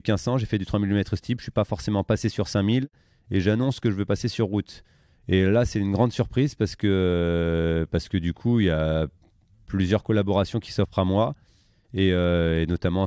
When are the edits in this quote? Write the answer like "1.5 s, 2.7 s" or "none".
none

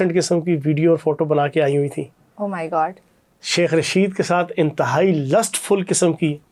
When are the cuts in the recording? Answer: none

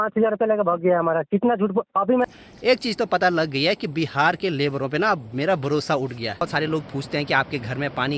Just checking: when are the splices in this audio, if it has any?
2.2 s, 6.4 s

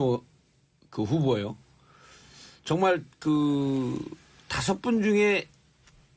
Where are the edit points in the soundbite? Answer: 2.8 s

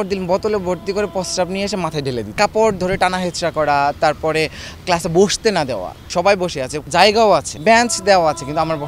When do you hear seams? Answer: 2.3 s, 5.9 s, 6.8 s, 7.5 s

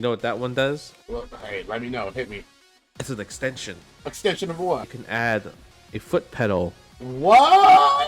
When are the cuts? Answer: 0.9 s, 4.2 s, 5.0 s, 7.1 s

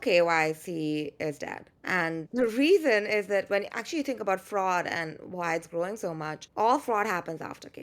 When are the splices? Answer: 2.3 s

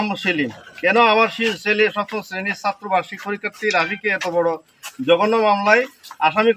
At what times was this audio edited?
none

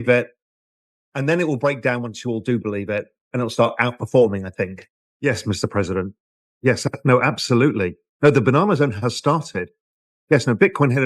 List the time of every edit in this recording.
5.0 s

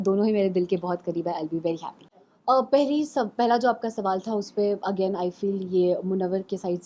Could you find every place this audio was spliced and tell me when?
2.0 s

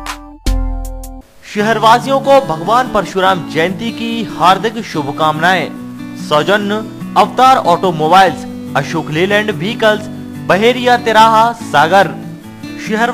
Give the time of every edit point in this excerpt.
1.1 s

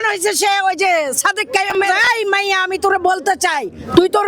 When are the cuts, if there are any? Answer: 2.0 s

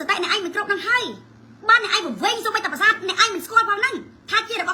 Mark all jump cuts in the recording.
none

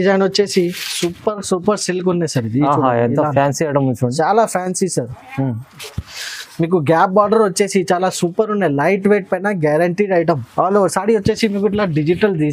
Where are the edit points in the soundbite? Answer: 10.5 s

